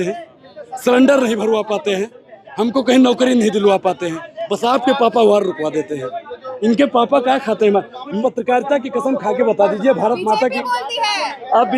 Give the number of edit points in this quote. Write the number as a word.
one